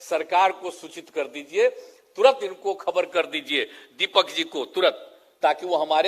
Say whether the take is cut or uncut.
uncut